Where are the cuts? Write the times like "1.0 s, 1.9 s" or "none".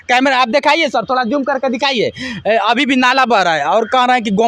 none